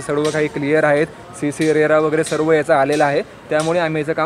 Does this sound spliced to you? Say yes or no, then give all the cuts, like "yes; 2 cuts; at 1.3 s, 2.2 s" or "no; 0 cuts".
no; 0 cuts